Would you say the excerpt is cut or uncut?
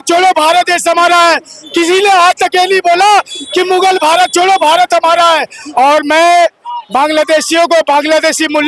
cut